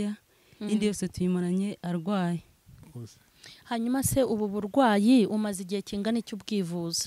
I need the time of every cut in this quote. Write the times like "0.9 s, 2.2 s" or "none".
2.9 s

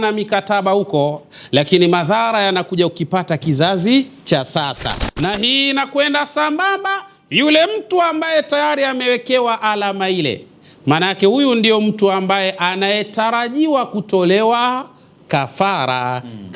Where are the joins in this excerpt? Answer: 5.0 s

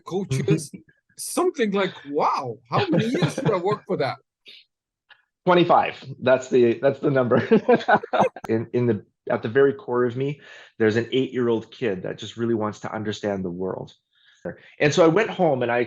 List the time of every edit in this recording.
8.4 s, 14.5 s

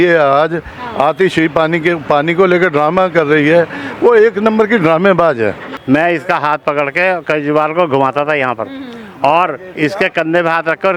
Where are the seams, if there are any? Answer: 5.7 s

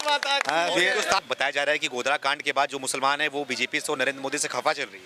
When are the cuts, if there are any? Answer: 1.2 s

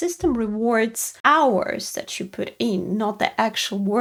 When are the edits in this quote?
none

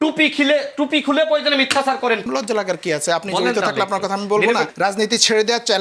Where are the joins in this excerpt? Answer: 2.2 s, 4.7 s

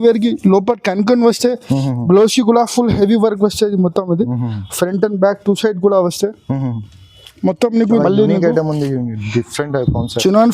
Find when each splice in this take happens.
7.9 s

